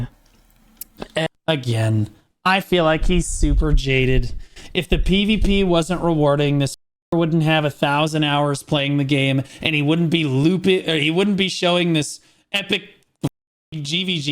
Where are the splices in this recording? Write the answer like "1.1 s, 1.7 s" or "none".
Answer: 1.3 s